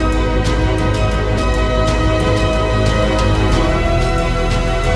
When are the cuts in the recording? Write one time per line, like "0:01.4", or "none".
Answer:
none